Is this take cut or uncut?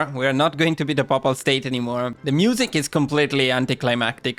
cut